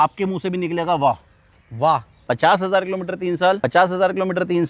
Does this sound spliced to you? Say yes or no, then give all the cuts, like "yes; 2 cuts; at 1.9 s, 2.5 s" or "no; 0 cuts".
yes; 2 cuts; at 2.1 s, 3.6 s